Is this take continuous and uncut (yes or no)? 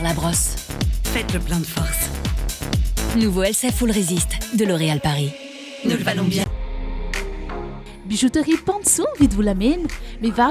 yes